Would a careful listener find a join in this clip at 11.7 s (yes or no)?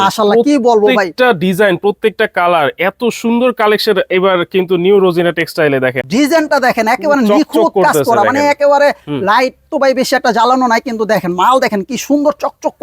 no